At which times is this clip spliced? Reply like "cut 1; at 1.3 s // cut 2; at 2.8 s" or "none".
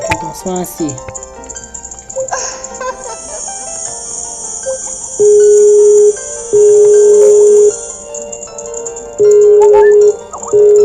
cut 1; at 7.6 s